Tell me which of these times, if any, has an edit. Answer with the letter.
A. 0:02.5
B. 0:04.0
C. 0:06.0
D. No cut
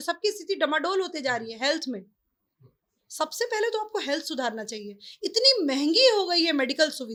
D